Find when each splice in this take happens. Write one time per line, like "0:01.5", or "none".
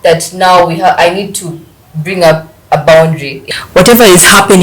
0:03.3